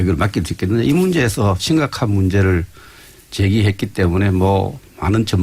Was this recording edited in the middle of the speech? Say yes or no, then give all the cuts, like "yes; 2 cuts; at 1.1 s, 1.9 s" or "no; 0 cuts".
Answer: yes; 1 cut; at 1.4 s